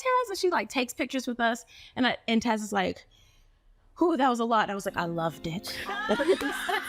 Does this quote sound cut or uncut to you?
uncut